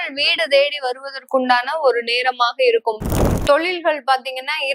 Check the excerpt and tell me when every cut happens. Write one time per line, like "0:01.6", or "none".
0:03.1